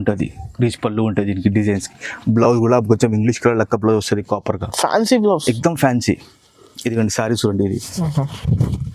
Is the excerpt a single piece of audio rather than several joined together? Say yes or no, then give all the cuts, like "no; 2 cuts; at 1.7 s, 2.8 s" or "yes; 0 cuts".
yes; 0 cuts